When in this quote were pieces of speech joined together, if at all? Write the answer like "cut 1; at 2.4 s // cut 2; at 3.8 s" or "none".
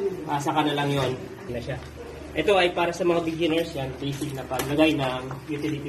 cut 1; at 1.6 s